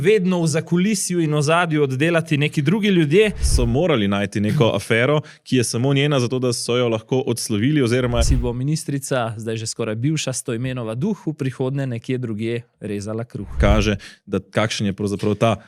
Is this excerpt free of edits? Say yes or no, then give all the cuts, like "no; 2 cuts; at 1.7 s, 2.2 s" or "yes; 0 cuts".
no; 3 cuts; at 3.5 s, 8.2 s, 13.6 s